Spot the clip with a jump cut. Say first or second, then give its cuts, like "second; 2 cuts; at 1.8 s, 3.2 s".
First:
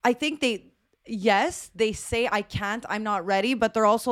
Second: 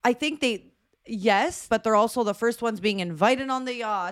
second; 1 cut; at 1.7 s